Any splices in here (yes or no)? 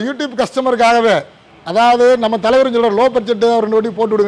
no